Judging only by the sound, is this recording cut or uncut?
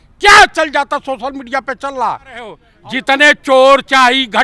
cut